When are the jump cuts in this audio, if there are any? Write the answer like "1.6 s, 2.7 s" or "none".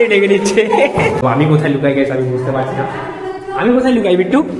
1.2 s